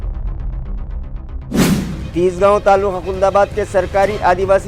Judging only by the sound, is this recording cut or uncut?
cut